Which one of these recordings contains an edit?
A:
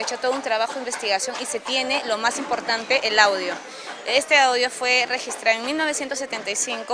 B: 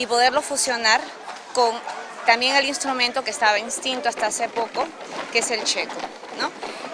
B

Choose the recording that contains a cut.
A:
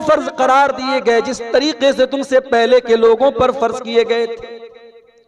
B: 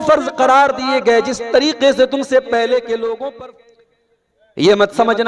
B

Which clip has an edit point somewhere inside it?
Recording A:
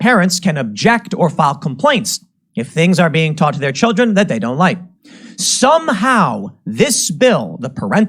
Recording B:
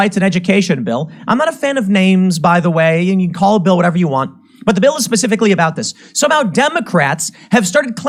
A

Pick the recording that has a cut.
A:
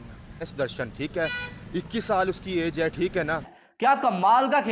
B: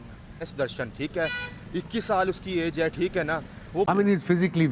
A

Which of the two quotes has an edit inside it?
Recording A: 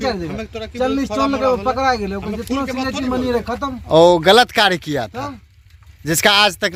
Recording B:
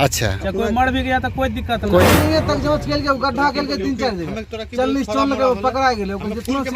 B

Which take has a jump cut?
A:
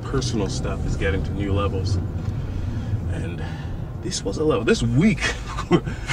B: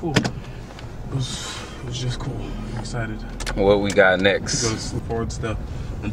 B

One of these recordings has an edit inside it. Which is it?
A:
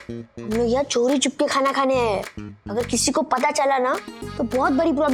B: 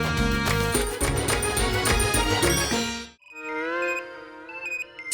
B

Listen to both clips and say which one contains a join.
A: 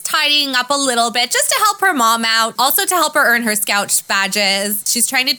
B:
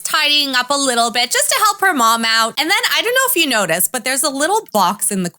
B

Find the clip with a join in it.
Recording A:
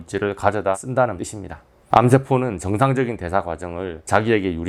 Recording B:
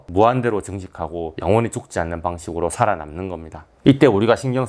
B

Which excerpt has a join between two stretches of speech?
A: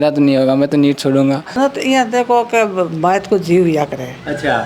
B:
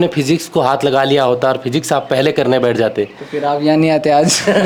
A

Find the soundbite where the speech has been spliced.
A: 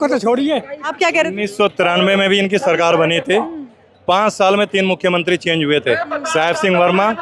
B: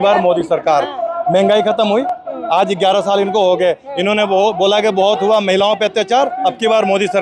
A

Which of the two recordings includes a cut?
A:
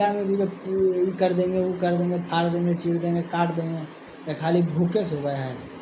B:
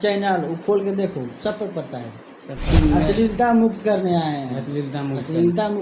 B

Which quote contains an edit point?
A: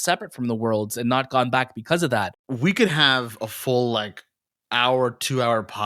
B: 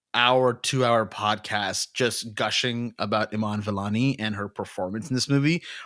A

